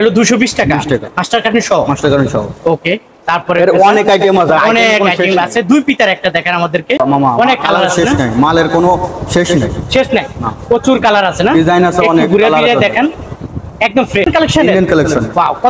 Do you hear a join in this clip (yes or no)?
yes